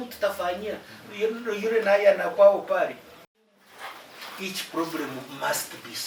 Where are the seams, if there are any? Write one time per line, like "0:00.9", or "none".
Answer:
0:03.5